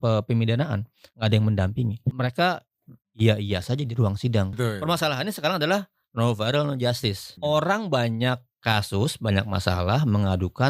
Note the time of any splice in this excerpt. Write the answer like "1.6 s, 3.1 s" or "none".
2.1 s, 4.6 s, 7.3 s